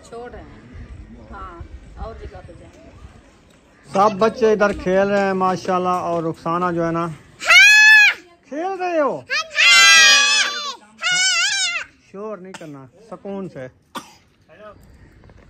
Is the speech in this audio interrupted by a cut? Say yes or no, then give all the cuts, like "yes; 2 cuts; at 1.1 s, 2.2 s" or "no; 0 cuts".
yes; 2 cuts; at 3.9 s, 14.8 s